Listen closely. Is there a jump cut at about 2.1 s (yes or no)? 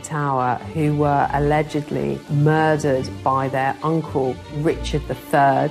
no